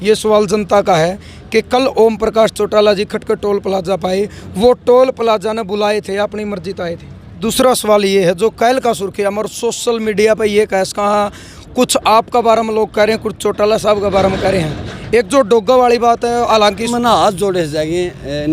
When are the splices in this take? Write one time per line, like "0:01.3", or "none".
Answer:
0:07.4
0:16.9